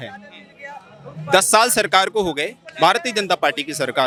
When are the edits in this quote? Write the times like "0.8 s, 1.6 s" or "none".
none